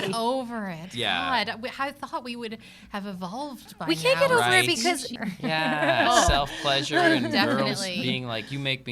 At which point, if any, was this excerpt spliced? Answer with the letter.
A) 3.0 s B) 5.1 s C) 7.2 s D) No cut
B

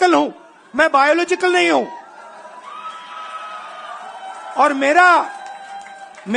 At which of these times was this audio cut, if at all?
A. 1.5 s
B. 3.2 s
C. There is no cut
C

